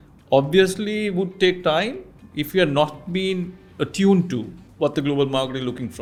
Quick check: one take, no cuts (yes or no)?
yes